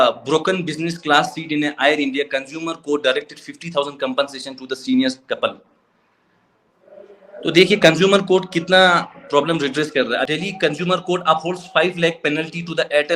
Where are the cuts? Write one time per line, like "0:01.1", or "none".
0:10.3